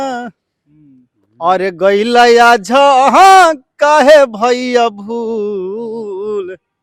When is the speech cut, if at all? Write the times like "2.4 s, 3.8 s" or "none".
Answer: none